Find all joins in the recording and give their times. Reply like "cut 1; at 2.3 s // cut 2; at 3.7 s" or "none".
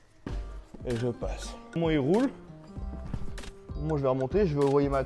cut 1; at 1.8 s